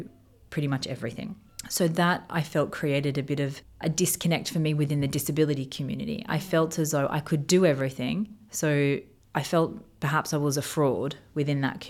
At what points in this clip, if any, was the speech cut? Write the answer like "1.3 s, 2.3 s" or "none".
1.5 s, 3.6 s, 9.2 s